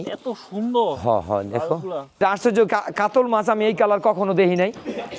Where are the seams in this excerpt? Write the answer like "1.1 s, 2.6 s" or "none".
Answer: 2.2 s